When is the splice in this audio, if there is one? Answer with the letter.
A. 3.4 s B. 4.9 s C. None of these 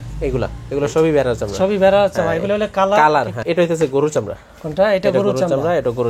A